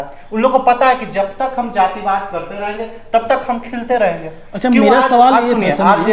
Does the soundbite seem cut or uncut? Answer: uncut